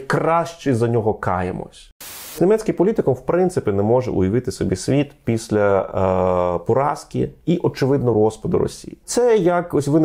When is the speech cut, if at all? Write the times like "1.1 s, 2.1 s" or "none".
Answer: 2.3 s, 9.1 s